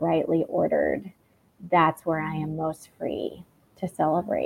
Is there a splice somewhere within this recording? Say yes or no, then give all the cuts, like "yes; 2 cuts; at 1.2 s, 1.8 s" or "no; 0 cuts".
no; 0 cuts